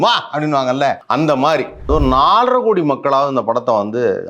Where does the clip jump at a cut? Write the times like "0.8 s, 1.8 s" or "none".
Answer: 1.0 s, 1.9 s

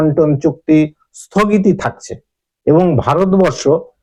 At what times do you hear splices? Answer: none

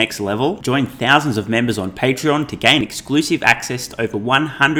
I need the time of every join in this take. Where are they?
none

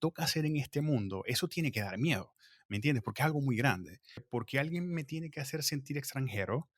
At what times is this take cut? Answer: 4.2 s

